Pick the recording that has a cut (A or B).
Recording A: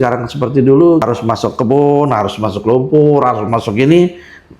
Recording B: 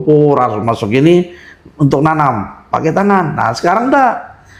A